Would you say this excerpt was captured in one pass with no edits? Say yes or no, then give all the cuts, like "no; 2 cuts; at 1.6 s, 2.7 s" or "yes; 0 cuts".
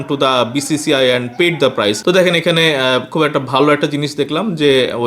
no; 1 cut; at 2.0 s